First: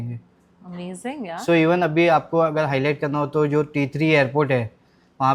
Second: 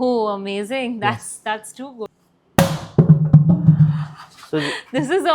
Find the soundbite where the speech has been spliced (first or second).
second